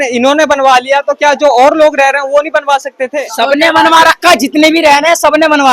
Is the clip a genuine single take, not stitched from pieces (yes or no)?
yes